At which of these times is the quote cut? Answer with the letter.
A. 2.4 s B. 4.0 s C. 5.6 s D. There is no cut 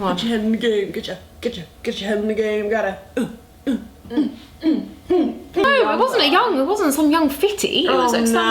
C